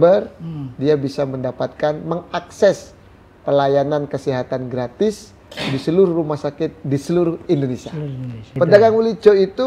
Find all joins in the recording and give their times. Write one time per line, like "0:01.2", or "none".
0:08.4